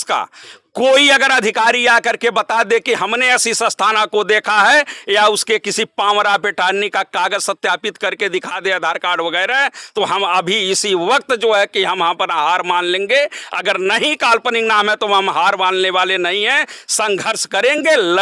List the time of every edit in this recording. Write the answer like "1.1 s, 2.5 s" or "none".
none